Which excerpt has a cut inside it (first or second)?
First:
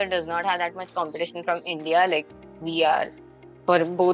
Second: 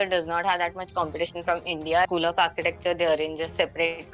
second